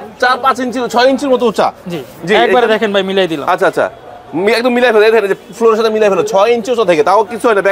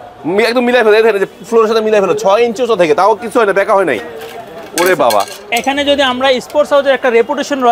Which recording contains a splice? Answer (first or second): second